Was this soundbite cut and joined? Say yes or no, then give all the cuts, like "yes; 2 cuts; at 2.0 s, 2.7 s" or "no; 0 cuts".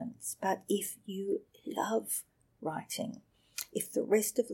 no; 0 cuts